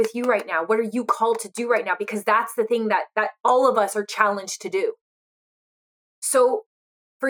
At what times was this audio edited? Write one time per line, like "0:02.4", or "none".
none

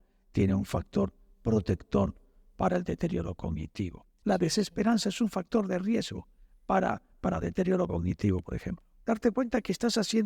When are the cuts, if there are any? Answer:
0:04.1
0:08.9

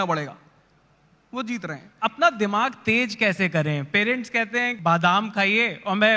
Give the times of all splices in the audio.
0:01.9
0:04.7

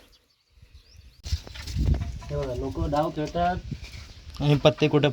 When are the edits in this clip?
0:01.2

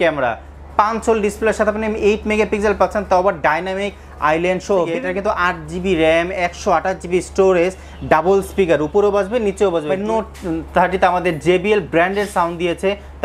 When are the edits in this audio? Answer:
0:05.0
0:09.9

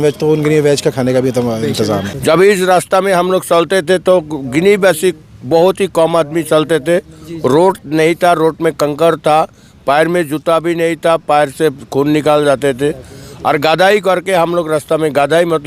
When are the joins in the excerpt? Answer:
0:02.1

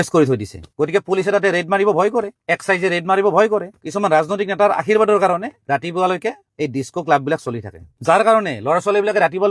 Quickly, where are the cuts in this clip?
0:03.7

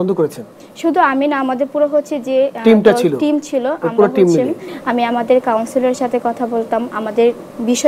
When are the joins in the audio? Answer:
0:04.7

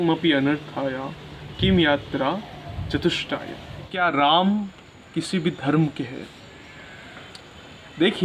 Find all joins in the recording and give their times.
0:03.9

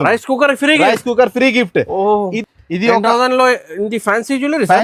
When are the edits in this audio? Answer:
0:02.4

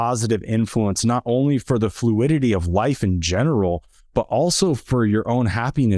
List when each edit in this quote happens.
none

